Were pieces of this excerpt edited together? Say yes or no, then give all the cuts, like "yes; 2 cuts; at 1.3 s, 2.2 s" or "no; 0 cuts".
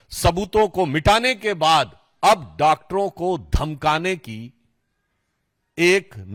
no; 0 cuts